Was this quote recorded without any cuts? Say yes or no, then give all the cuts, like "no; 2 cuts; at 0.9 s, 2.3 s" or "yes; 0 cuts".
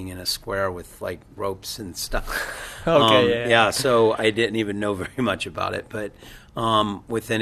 yes; 0 cuts